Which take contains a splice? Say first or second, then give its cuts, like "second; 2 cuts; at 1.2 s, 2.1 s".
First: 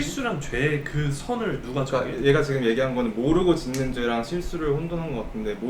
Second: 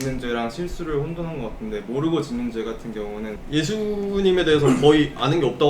second; 1 cut; at 3.4 s